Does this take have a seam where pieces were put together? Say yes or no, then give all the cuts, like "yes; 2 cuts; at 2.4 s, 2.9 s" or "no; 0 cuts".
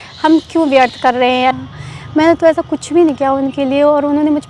yes; 1 cut; at 1.6 s